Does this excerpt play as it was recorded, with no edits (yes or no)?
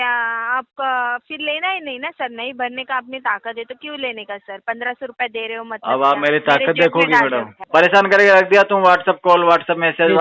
no